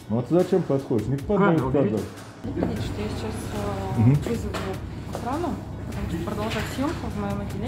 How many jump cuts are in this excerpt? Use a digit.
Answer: 2